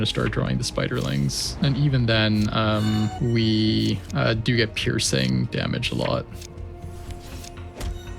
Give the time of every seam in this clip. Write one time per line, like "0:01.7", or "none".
0:01.5
0:03.2
0:04.1